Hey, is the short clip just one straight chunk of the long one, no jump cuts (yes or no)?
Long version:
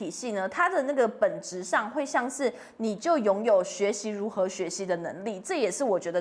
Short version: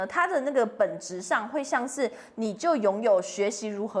yes